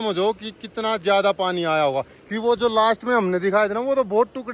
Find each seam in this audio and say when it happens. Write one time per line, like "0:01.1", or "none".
none